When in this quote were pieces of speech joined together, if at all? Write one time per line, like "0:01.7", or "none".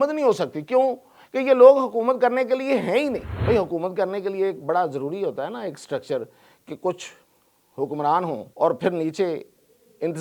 0:03.3
0:08.5